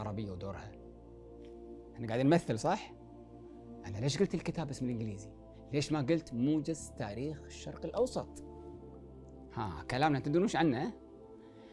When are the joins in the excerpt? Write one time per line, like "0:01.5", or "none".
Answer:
none